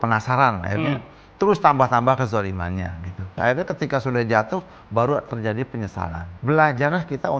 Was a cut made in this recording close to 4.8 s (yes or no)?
no